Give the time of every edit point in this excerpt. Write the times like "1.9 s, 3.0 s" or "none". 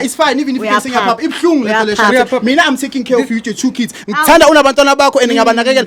none